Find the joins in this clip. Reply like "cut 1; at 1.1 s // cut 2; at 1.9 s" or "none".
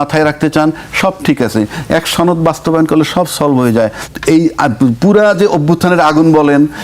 cut 1; at 4.1 s